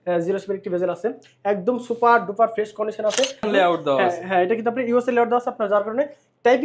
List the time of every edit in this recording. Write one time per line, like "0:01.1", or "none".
0:03.5